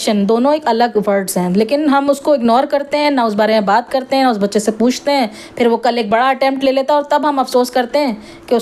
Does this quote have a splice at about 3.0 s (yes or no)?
no